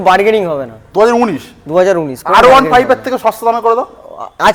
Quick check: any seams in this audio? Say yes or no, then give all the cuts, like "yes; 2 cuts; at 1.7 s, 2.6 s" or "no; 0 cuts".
no; 0 cuts